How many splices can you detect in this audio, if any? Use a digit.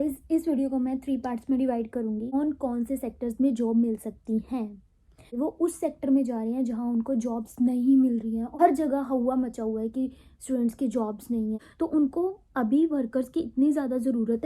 4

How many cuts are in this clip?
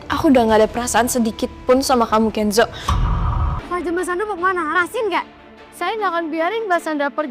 1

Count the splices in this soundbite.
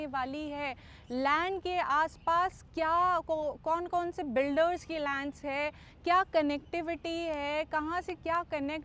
0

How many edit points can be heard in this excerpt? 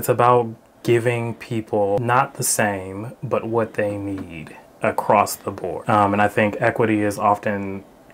2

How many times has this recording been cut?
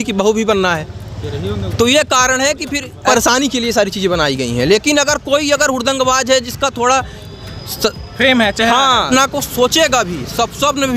2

